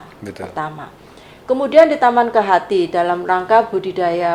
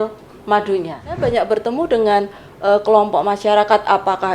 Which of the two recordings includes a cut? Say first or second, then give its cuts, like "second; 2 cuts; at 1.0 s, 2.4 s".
second; 1 cut; at 1.0 s